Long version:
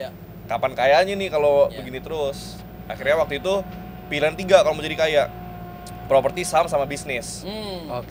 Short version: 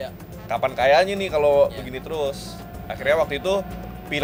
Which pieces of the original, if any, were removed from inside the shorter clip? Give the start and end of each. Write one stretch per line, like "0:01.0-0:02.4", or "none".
none